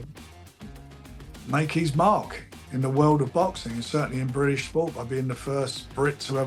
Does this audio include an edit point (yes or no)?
no